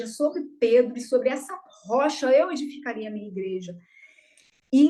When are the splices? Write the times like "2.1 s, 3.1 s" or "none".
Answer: none